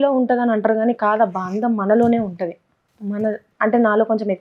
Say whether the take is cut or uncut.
uncut